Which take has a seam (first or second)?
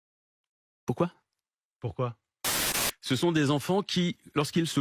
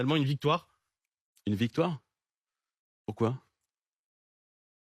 first